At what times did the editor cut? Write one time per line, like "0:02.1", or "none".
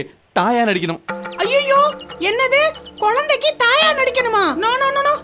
none